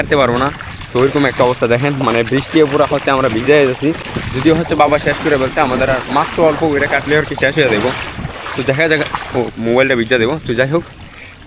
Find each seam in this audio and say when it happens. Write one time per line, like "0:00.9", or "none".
none

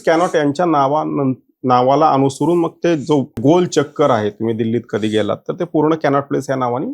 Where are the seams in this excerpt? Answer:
0:03.4

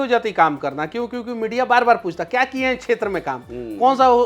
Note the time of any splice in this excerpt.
none

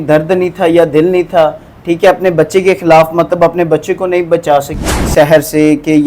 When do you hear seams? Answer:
0:05.0

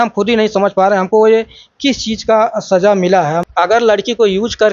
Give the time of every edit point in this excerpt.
0:03.4

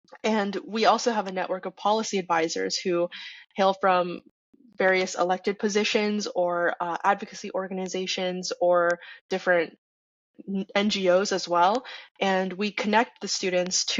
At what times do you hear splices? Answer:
0:09.1

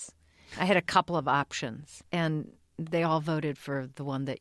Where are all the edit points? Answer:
0:02.0

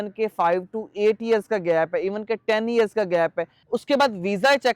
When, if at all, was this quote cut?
0:03.6

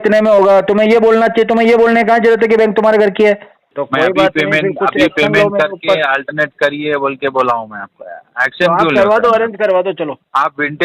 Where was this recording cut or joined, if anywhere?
0:03.6

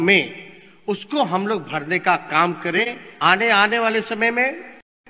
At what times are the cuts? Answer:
0:03.0

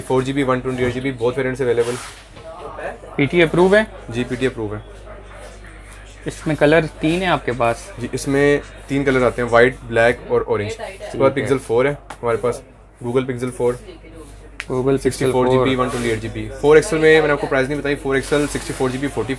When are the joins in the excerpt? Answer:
none

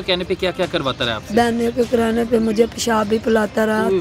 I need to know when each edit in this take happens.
none

